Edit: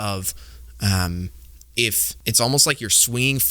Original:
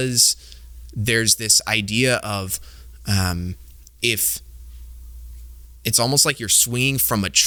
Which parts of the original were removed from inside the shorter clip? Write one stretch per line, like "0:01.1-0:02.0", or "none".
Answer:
0:04.3-0:05.7